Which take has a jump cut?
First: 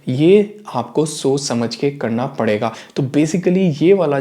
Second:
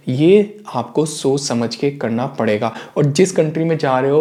first; 1 cut; at 2.8 s

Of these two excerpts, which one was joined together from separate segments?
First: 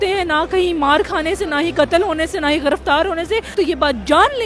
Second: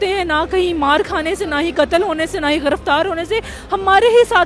first; 1 cut; at 3.5 s

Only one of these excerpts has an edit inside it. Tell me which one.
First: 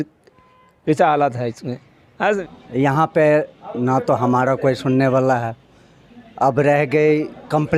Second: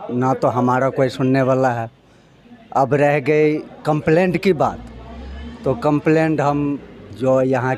first; 1 cut; at 2.4 s

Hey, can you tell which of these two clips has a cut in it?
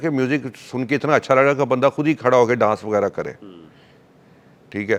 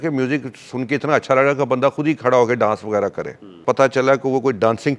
second; 1 cut; at 3.6 s

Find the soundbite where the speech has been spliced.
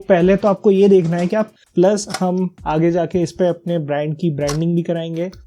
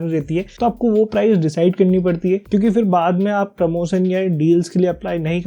first; 1 cut; at 1.5 s

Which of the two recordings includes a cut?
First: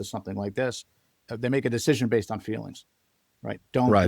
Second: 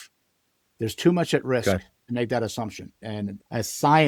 first; 1 cut; at 1.2 s

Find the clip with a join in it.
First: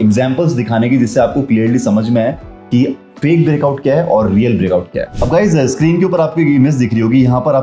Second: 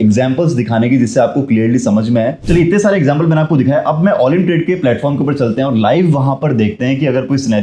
second; 1 cut; at 2.4 s

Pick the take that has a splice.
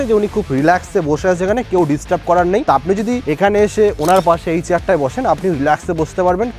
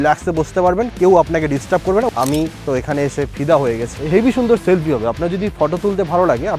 second; 2 cuts; at 2.1 s, 3.9 s

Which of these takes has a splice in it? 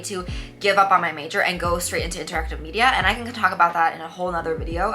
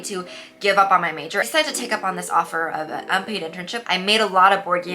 second; 2 cuts; at 1.4 s, 3.7 s

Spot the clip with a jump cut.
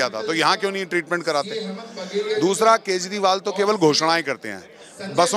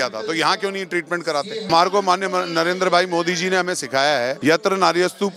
second; 2 cuts; at 1.7 s, 4.4 s

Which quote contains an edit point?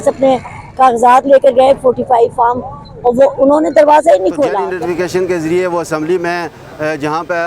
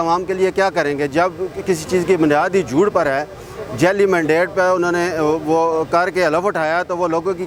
first; 1 cut; at 4.7 s

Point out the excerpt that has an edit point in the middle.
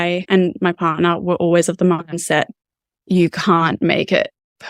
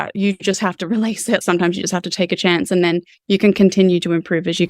second; 1 cut; at 1.4 s

